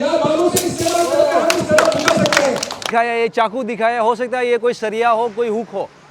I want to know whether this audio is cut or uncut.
cut